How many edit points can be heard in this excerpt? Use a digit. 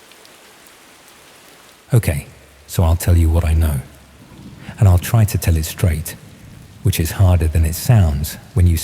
1